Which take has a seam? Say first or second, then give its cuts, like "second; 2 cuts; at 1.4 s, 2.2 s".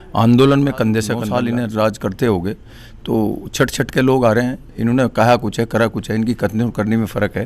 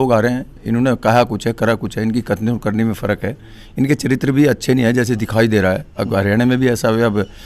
first; 1 cut; at 1.2 s